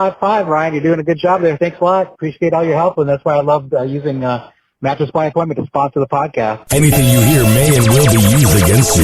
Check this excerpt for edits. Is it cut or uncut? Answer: cut